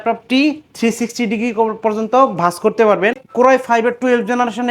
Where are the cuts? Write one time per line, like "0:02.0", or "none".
0:03.2